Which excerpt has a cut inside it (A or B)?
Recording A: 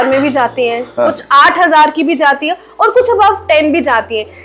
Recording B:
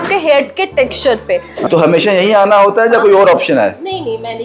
B